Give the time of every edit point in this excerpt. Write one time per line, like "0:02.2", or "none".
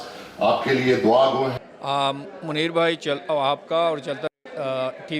0:01.6